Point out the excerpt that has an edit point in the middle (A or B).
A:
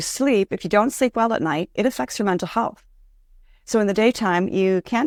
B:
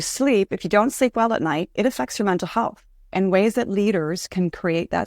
B